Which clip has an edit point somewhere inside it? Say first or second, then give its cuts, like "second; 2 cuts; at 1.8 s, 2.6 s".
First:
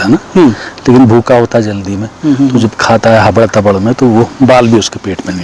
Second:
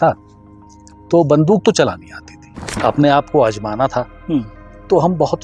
second; 1 cut; at 2.8 s